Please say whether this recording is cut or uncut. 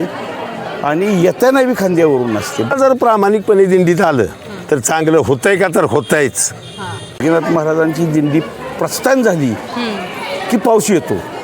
cut